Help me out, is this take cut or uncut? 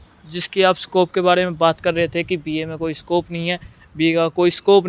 uncut